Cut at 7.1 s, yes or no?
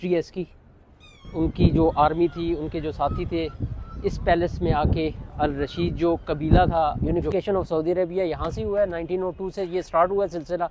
yes